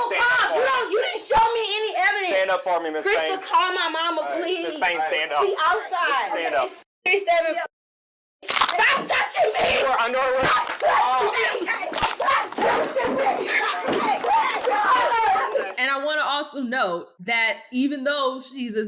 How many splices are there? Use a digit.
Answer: 2